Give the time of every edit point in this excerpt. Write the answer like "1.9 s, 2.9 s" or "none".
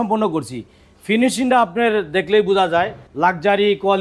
3.0 s